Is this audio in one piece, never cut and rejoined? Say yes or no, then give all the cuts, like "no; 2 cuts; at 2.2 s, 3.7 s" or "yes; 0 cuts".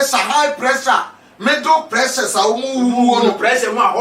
yes; 0 cuts